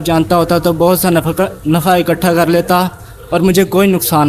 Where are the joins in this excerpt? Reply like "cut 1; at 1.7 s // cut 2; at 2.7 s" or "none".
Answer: none